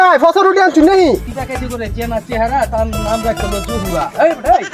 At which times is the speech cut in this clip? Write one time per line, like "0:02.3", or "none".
0:01.3